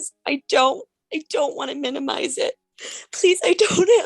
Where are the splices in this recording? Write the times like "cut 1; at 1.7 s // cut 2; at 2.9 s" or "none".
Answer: cut 1; at 2.7 s